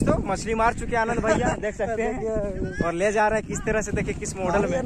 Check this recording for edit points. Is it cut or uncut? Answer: uncut